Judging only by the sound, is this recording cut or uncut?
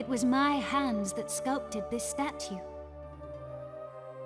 cut